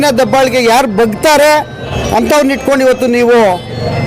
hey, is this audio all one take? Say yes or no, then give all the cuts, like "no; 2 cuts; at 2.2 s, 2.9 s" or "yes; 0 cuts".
no; 1 cut; at 1.9 s